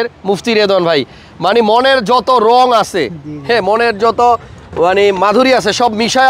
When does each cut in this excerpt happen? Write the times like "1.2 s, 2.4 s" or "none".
none